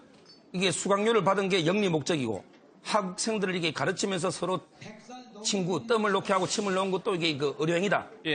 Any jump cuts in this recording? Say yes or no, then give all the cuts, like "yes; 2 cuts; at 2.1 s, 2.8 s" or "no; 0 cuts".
yes; 1 cut; at 2.4 s